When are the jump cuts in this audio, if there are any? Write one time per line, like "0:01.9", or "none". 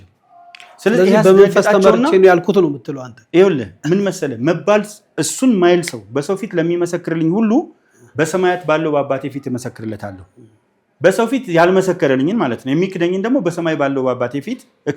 none